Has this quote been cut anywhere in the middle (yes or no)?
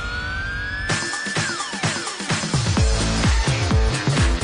no